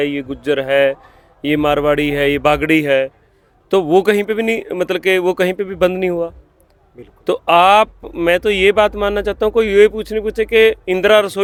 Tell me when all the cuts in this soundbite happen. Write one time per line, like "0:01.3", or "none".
none